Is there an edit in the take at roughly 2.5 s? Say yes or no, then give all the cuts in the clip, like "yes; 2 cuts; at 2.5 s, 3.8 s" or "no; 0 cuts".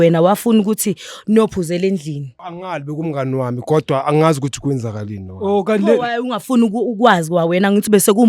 yes; 1 cut; at 2.5 s